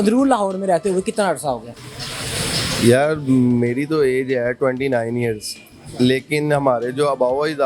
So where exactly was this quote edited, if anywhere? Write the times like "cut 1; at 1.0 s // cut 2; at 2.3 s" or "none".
none